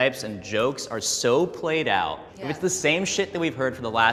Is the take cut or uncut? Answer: uncut